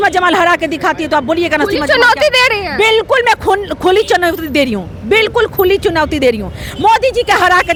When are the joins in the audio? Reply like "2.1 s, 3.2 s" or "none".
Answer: none